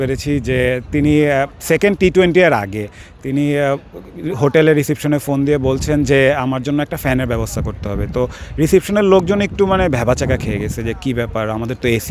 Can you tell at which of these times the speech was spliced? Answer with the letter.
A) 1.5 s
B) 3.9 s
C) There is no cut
C